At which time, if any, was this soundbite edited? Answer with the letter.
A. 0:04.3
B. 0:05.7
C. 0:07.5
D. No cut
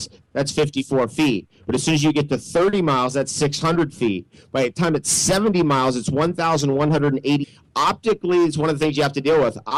D